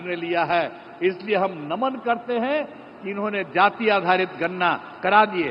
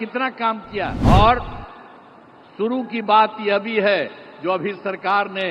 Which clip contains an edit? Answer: second; 1 cut; at 1.0 s

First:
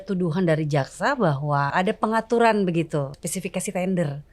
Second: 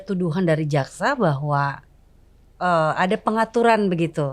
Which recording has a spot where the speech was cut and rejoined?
first; 2 cuts; at 1.7 s, 3.2 s

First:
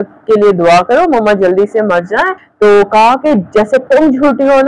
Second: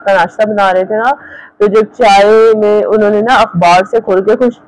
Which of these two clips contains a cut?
first; 1 cut; at 2.4 s

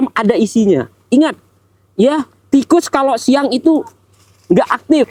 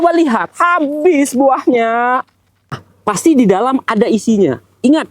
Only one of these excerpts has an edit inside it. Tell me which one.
second; 1 cut; at 2.8 s

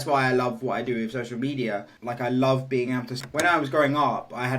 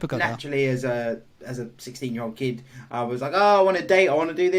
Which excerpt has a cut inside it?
first; 1 cut; at 3.2 s

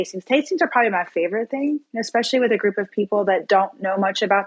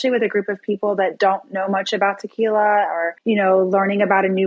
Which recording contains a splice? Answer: second; 1 cut; at 3.1 s

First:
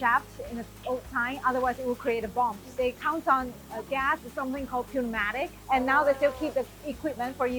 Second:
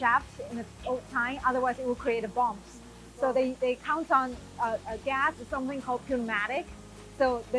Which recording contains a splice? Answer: first; 3 cuts; at 2.7 s, 3.7 s, 5.6 s

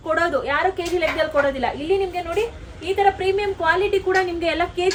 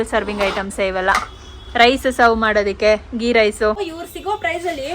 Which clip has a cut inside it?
second; 1 cut; at 3.8 s

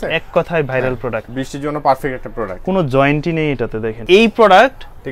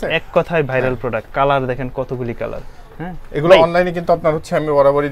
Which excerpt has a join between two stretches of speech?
first; 2 cuts; at 1.3 s, 3.9 s

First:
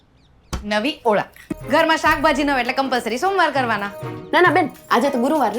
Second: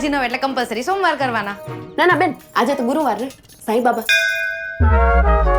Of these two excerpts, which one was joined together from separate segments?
first; 1 cut; at 1.4 s

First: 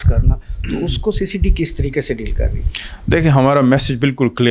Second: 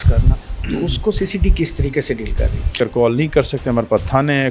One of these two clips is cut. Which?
second; 1 cut; at 2.8 s

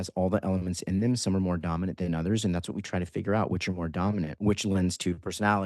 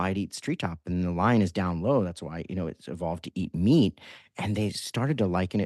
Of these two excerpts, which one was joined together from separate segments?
first; 1 cut; at 4.3 s

